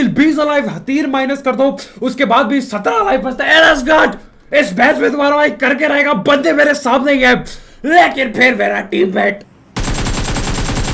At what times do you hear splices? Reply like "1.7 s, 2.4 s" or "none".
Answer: 9.9 s